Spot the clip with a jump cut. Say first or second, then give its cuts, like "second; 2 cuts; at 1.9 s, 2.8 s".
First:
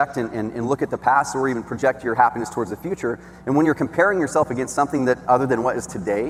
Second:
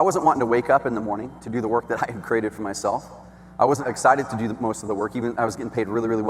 second; 1 cut; at 3.8 s